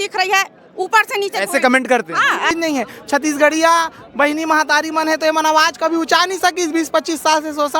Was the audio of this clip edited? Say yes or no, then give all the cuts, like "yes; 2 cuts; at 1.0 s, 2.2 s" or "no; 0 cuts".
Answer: yes; 1 cut; at 2.5 s